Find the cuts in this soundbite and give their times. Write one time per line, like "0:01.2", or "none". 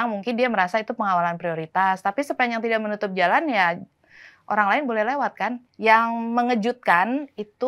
0:05.6